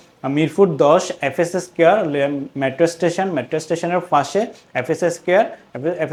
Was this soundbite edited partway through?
no; 0 cuts

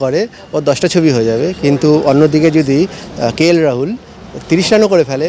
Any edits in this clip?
no; 0 cuts

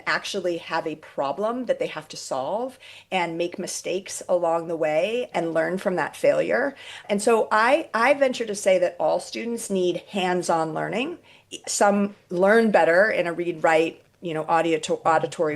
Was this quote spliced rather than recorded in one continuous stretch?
yes; 3 cuts; at 5.3 s, 7.0 s, 11.7 s

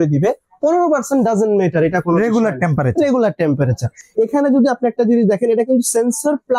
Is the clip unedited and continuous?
yes; 0 cuts

